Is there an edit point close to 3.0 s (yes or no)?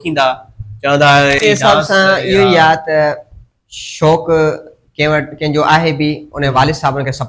no